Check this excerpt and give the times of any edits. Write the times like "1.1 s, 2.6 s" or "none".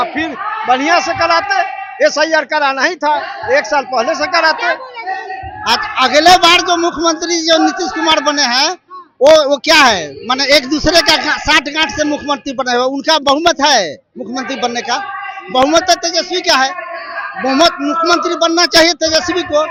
none